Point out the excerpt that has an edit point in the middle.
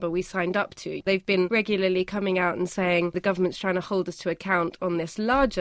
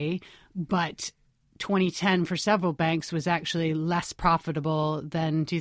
first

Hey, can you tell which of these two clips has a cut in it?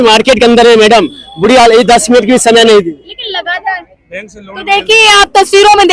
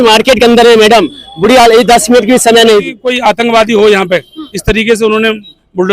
second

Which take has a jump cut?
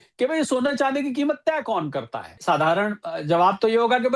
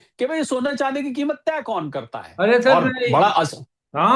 first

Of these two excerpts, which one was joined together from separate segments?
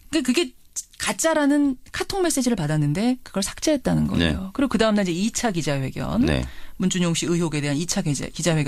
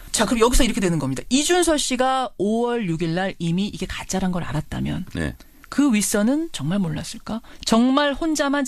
second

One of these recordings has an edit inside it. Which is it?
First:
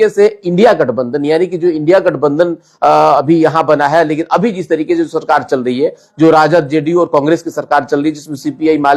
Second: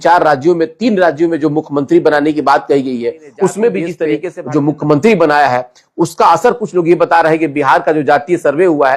second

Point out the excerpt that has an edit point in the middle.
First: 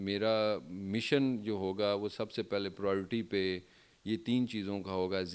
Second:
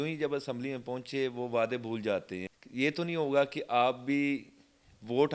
second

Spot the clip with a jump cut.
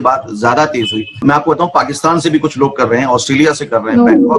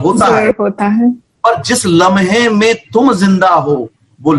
first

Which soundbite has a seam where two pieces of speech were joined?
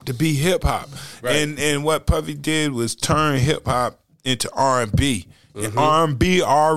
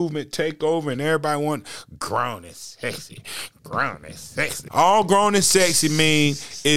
second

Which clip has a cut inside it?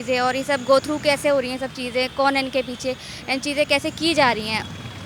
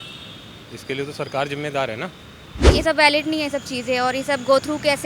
second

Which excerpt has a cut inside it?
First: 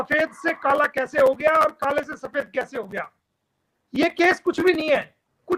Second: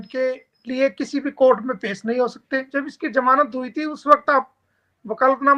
second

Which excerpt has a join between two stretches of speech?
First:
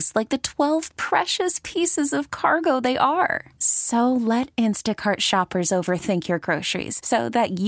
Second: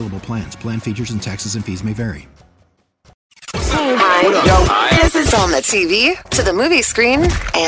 second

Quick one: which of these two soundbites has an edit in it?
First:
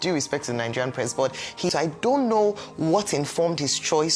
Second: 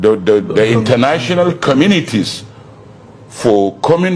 first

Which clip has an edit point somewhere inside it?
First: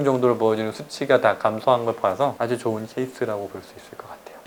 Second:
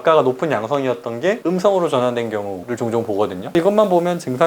second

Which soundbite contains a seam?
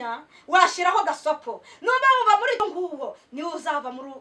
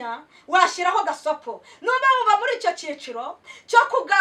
first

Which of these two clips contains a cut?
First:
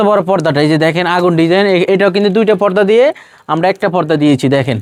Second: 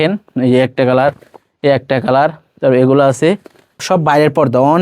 second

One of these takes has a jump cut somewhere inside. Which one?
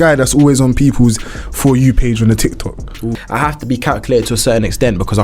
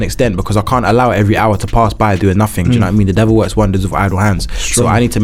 first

